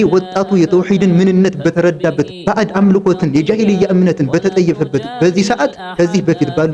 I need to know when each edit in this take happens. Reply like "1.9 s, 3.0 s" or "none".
none